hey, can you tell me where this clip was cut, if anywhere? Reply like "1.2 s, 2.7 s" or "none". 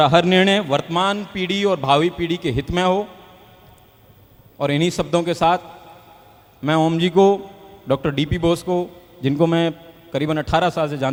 none